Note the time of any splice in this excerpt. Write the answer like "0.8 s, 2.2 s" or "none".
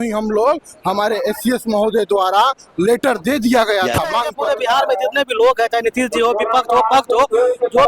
4.3 s

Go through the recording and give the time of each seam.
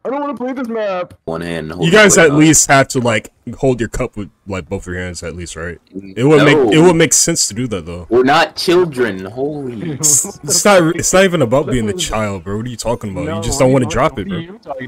1.3 s

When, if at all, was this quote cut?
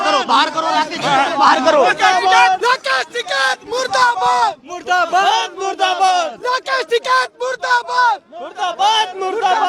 2.6 s

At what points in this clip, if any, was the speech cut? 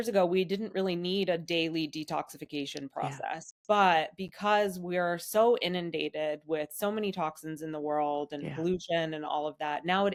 none

